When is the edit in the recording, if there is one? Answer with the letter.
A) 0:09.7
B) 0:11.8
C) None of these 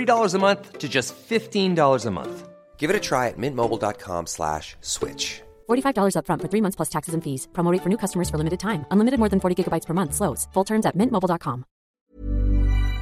B